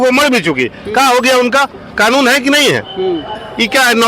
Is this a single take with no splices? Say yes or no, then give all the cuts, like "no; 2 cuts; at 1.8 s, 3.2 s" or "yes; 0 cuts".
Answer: yes; 0 cuts